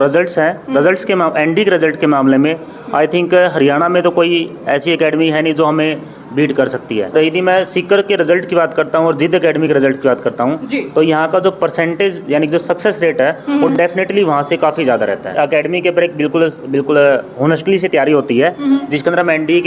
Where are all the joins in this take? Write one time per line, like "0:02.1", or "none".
0:07.1
0:15.3